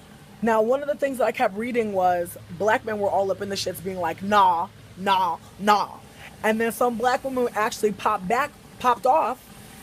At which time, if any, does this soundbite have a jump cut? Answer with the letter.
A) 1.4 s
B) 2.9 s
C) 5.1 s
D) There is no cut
B